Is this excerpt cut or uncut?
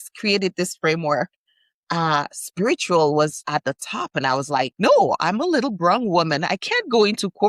cut